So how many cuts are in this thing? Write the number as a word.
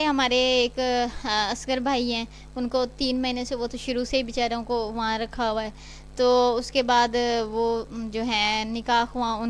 zero